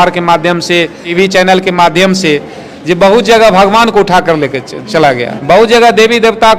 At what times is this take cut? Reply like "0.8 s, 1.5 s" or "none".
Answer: 1.1 s, 5.3 s